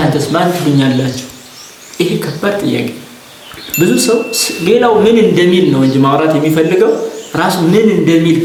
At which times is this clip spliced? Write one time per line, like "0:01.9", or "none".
none